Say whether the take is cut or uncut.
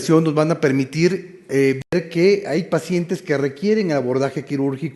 uncut